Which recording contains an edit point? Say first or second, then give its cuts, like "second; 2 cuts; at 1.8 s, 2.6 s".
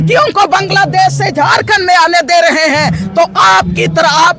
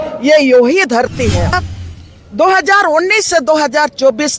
second; 1 cut; at 1.6 s